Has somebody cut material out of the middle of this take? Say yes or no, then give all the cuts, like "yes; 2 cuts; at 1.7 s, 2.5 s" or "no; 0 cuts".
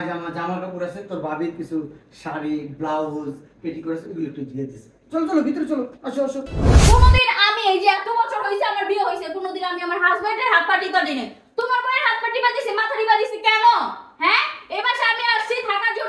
yes; 1 cut; at 6.8 s